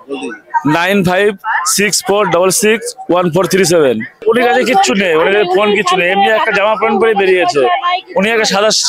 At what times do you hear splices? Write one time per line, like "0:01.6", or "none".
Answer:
0:04.2

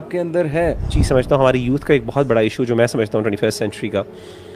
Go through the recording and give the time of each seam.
0:00.9

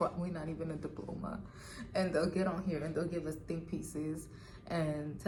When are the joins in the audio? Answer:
none

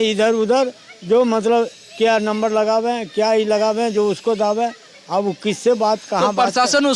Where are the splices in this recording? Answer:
none

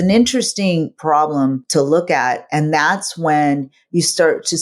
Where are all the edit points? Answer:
0:00.9

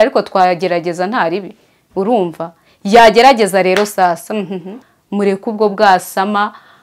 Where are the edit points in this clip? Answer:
0:04.7

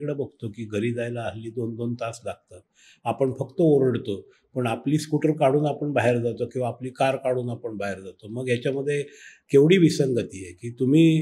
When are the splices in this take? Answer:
none

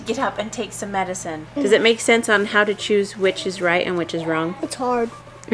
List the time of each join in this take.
0:01.5
0:04.6

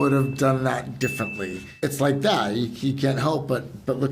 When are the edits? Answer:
0:01.6

